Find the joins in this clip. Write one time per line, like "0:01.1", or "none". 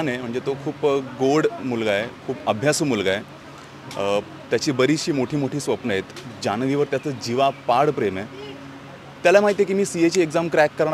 none